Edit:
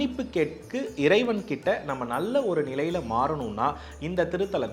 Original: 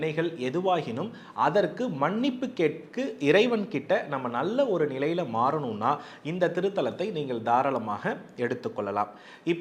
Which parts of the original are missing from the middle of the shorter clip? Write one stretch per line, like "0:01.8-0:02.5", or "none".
none